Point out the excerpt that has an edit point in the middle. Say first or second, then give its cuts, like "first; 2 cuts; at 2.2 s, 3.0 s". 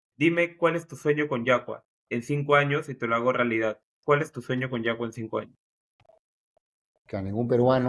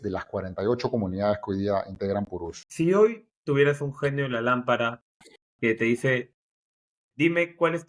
second; 2 cuts; at 2.6 s, 3.4 s